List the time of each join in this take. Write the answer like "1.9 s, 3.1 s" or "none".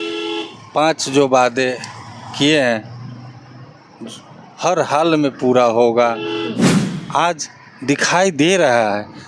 6.6 s